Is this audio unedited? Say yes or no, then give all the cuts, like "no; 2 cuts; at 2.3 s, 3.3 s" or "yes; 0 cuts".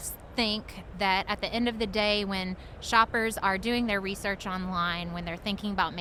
yes; 0 cuts